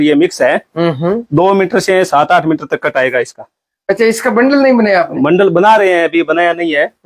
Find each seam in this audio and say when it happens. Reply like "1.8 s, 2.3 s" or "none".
none